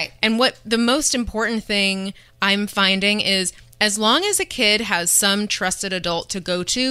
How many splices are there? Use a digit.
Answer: 0